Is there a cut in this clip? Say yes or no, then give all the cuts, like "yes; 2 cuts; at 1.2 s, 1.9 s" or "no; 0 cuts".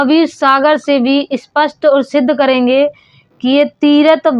no; 0 cuts